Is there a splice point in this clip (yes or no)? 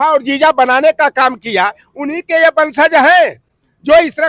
no